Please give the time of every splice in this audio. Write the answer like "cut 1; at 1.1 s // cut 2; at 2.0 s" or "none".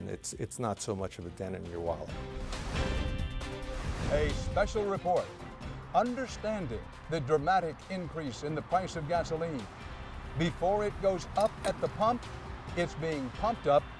cut 1; at 2.0 s